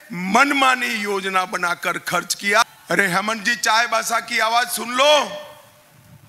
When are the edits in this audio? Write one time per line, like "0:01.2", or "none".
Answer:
0:02.6